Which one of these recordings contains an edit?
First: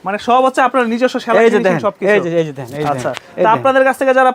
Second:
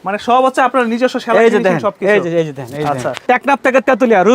second; 1 cut; at 3.2 s

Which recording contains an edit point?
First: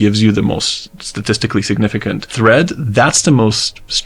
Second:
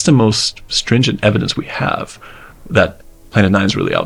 first; 1 cut; at 2.3 s

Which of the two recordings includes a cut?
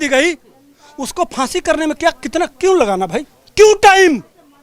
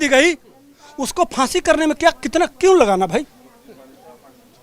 first; 1 cut; at 3.4 s

